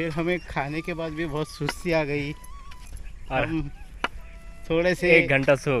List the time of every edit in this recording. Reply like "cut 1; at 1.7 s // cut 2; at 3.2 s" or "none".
none